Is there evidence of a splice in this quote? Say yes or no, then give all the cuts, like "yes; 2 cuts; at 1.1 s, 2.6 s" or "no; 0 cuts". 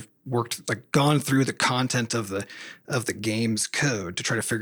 no; 0 cuts